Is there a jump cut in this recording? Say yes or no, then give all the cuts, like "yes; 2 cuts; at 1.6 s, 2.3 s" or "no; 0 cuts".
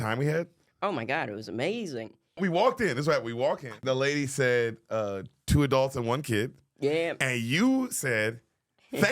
yes; 2 cuts; at 2.4 s, 3.8 s